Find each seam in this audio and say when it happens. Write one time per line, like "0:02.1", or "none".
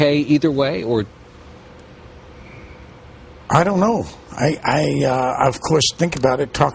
0:01.9